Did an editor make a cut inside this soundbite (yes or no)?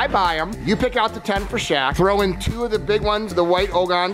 no